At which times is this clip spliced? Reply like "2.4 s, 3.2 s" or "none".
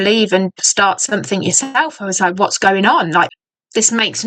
3.3 s

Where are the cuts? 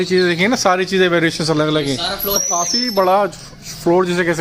none

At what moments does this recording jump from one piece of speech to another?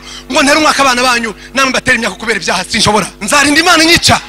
3.2 s

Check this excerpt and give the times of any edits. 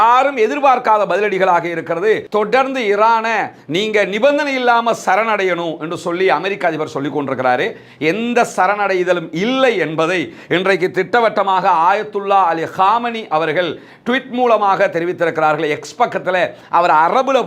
2.3 s

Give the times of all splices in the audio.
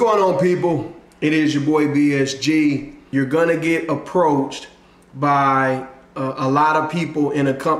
3.1 s

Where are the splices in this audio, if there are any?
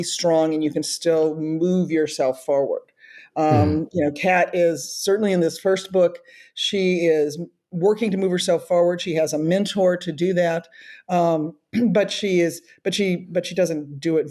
none

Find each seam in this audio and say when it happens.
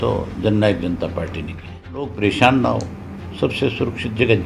2.1 s

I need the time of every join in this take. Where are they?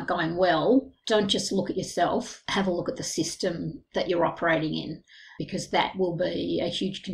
1.0 s

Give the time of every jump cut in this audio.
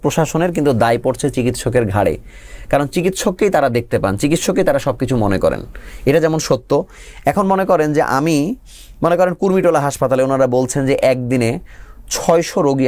none

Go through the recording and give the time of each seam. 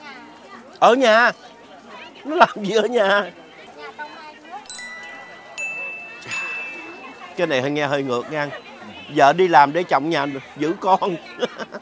none

